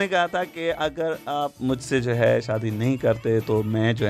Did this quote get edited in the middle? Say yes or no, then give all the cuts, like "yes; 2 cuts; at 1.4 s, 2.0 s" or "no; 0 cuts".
no; 0 cuts